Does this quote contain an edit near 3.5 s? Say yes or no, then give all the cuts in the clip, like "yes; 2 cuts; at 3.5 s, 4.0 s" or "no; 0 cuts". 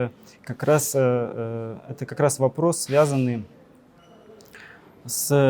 no; 0 cuts